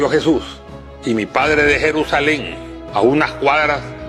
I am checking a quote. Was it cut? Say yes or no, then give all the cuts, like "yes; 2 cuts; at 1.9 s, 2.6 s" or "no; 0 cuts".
no; 0 cuts